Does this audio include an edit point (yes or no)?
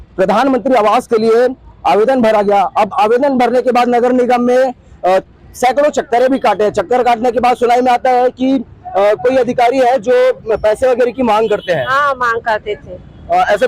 no